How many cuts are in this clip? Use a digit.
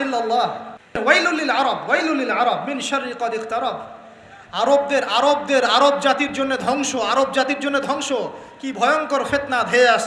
1